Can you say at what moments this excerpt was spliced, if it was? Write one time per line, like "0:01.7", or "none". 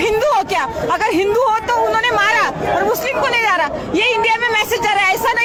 none